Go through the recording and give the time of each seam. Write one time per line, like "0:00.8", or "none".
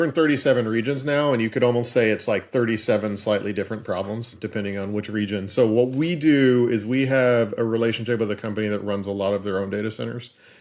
none